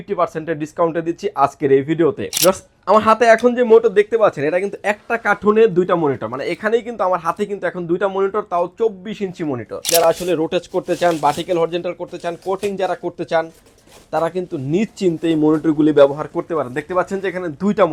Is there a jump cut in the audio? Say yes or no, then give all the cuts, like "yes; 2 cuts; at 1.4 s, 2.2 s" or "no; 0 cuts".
yes; 2 cuts; at 2.3 s, 9.8 s